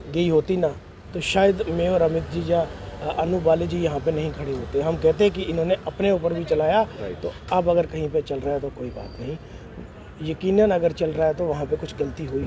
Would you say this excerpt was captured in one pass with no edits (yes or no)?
yes